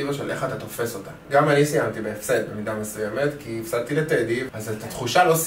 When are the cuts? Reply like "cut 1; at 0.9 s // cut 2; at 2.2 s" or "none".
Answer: cut 1; at 1.2 s // cut 2; at 4.5 s